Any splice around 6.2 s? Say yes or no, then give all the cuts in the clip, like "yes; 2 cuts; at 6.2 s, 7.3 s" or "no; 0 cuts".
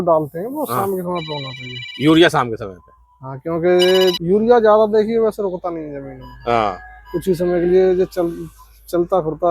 no; 1 cut; at 4.2 s